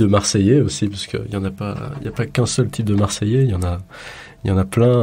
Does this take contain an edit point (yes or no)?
no